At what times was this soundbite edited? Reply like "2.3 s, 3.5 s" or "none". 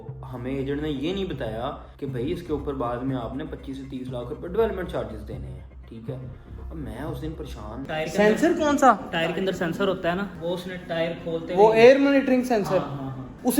7.8 s

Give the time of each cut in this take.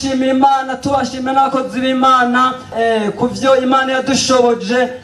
2.7 s

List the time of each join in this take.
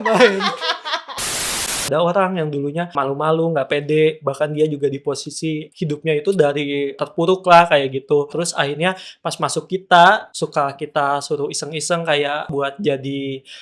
1.3 s, 2.9 s, 5.7 s, 7.0 s, 8.3 s, 10.3 s, 12.5 s

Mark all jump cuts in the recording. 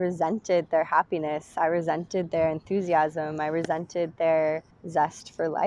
4.7 s

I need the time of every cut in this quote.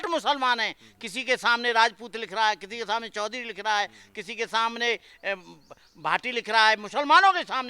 none

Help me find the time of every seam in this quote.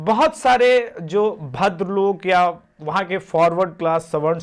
none

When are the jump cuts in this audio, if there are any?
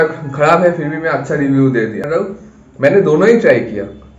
2.1 s

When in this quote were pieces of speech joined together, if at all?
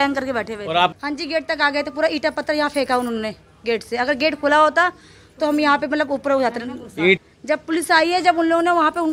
0.9 s, 7.2 s

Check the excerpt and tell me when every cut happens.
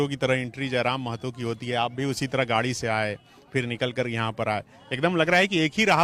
none

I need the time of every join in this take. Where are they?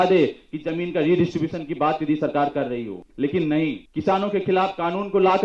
3.0 s, 3.9 s

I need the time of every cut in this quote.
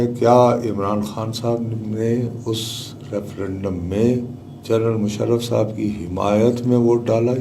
none

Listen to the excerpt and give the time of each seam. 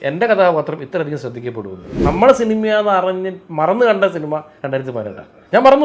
1.9 s

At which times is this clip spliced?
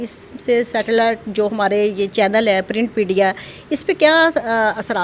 none

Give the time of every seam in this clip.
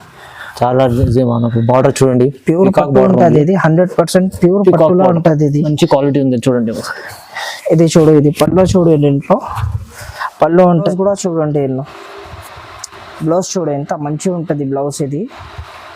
10.9 s

